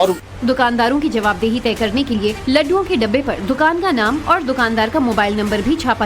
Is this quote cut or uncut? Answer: cut